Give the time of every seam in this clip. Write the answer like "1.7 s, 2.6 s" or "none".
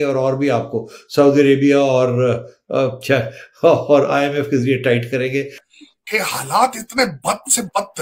5.6 s